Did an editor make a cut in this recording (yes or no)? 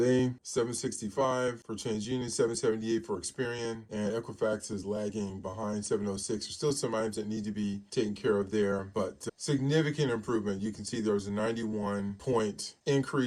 no